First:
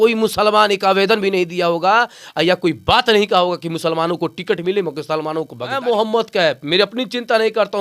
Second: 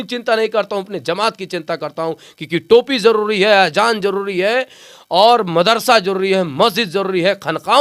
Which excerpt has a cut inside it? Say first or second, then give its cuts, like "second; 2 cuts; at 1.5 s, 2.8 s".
first; 1 cut; at 5.8 s